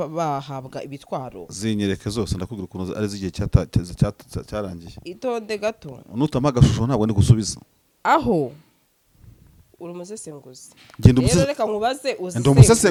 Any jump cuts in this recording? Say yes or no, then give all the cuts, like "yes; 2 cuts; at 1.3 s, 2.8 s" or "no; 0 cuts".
no; 0 cuts